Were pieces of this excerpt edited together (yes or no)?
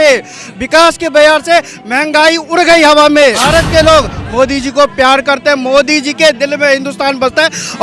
yes